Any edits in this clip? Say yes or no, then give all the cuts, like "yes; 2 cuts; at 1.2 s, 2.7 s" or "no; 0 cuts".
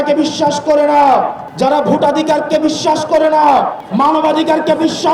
yes; 2 cuts; at 1.4 s, 3.8 s